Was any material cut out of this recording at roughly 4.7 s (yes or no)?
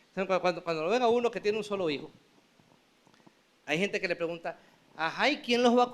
no